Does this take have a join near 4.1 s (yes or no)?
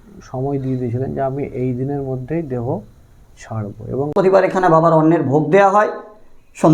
yes